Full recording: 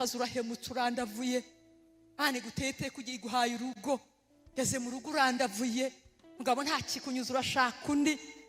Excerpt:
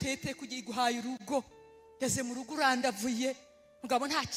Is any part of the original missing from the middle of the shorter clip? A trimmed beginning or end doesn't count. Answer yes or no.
no